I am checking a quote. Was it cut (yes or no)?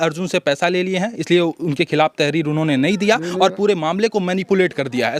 no